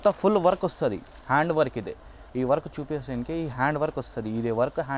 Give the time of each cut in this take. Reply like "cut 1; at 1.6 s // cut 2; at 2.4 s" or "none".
none